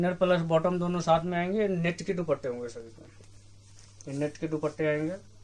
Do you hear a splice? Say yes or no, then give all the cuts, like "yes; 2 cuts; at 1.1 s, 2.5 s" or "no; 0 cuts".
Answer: no; 0 cuts